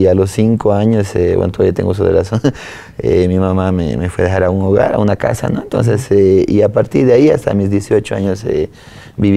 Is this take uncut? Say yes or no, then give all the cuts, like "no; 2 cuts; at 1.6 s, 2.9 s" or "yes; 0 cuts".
yes; 0 cuts